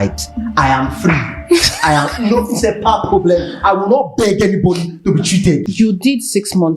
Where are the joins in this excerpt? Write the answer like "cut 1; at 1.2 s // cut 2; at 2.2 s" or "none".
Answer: cut 1; at 5.7 s